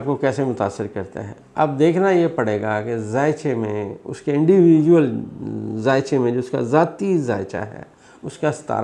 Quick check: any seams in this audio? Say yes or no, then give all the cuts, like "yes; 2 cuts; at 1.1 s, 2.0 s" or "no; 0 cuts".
no; 0 cuts